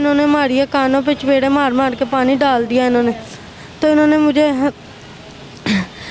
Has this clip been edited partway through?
no; 0 cuts

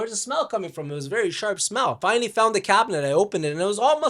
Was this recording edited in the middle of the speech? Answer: yes; 1 cut; at 2.0 s

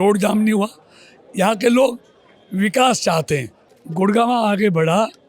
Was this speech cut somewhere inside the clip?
yes; 1 cut; at 3.6 s

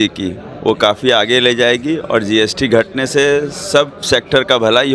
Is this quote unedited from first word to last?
yes; 0 cuts

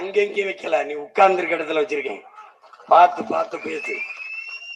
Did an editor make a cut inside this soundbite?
no; 0 cuts

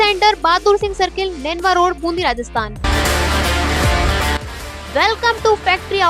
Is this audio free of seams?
no; 1 cut; at 2.8 s

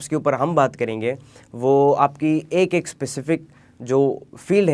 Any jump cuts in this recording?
no; 0 cuts

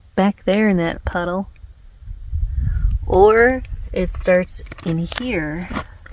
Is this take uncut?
yes; 0 cuts

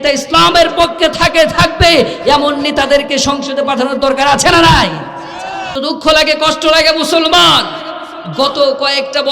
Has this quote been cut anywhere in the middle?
yes; 1 cut; at 5.8 s

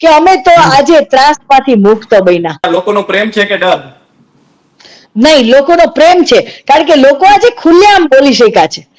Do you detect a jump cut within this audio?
yes; 1 cut; at 2.6 s

